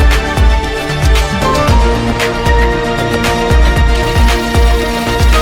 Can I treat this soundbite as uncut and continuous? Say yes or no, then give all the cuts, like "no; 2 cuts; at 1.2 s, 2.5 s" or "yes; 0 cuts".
yes; 0 cuts